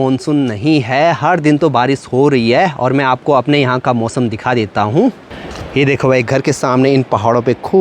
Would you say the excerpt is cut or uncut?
uncut